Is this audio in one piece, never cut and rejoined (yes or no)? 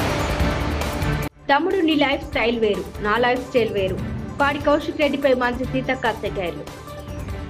no